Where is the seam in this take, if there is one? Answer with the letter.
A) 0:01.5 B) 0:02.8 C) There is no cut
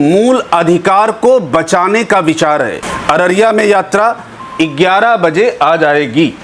B